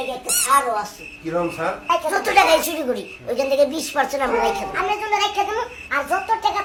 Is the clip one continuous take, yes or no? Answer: yes